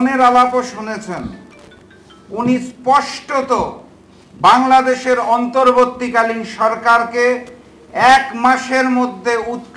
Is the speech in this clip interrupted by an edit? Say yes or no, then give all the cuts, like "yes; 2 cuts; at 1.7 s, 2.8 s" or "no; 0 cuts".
no; 0 cuts